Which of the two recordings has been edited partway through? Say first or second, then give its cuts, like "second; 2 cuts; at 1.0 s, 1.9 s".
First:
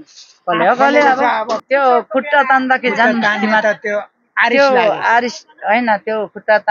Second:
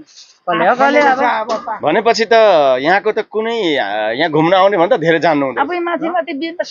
first; 1 cut; at 1.6 s